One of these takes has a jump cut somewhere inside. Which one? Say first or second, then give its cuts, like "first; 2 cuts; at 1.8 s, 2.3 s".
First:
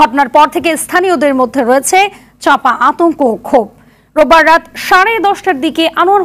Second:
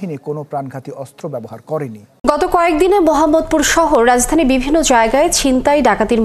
second; 1 cut; at 2.2 s